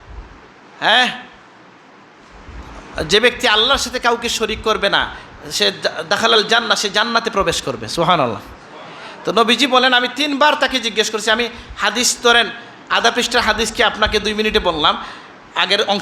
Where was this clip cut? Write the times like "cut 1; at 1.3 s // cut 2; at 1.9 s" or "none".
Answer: none

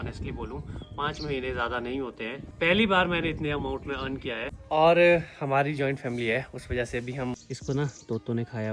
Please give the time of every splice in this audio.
cut 1; at 2.4 s // cut 2; at 4.5 s // cut 3; at 7.3 s

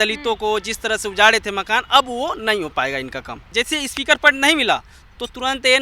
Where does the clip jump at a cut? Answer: cut 1; at 3.5 s

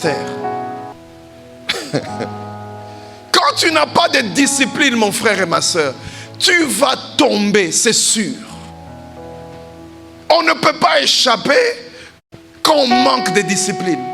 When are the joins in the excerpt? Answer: cut 1; at 1.0 s

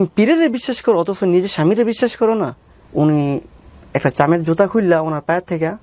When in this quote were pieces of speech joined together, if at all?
cut 1; at 2.6 s

